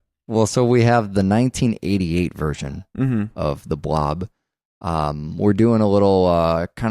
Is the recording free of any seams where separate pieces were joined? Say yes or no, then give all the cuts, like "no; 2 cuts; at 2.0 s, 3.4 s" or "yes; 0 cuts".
no; 1 cut; at 2.6 s